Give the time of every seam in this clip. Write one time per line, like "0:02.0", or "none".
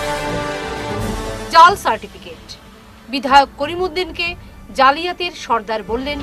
0:01.1

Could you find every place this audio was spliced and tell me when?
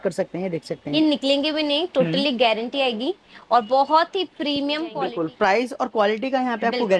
0:04.9

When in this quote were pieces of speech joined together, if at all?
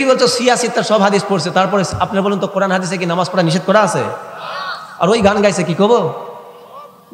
none

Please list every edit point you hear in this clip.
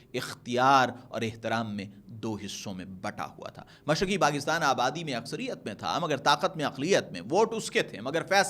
none

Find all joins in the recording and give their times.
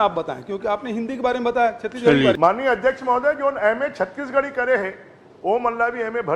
0:02.4

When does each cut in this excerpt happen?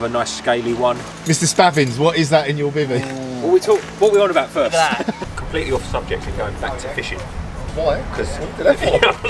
0:01.1
0:05.1

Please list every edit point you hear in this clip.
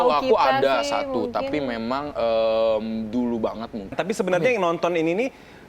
0:03.9

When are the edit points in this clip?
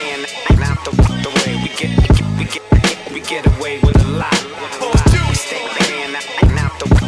0:05.4

